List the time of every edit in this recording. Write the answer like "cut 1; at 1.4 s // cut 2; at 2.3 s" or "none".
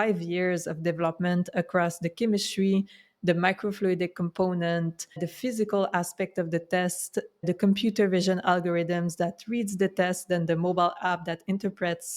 cut 1; at 5.3 s // cut 2; at 7.4 s